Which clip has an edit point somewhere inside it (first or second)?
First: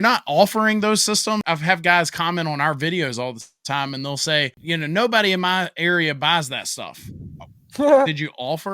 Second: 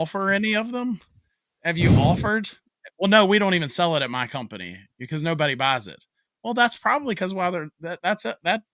first